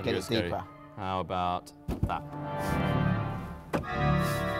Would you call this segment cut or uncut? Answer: cut